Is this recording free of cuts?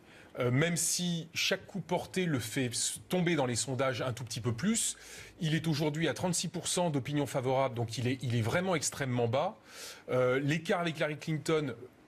yes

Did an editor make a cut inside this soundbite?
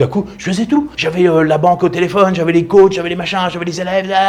no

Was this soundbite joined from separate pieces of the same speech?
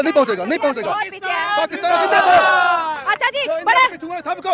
no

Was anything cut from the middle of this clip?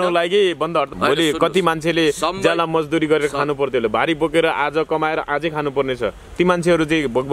yes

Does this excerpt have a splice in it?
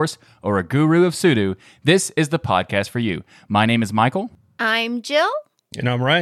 yes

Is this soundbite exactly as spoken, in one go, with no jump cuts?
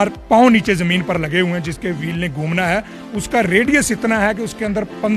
yes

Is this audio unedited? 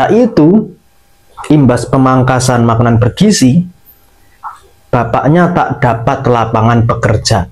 yes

